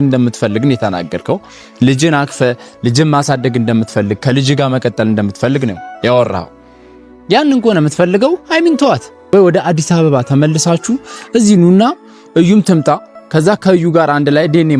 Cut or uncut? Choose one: cut